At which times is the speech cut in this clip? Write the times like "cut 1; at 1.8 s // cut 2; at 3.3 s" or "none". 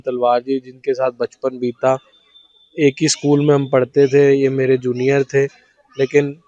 none